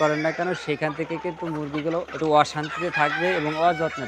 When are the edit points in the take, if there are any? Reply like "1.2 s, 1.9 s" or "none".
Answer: 2.1 s